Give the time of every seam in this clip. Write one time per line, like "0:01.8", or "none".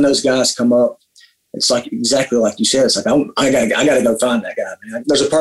none